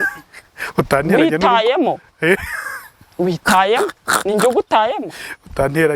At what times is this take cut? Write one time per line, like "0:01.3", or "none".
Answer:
none